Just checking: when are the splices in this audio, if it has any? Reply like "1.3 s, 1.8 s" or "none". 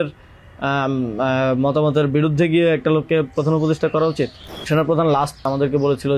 4.7 s, 5.5 s